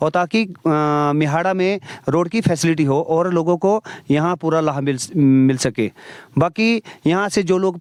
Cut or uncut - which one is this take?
uncut